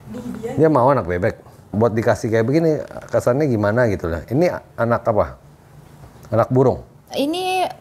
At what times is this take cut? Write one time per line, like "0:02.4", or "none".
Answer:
0:01.7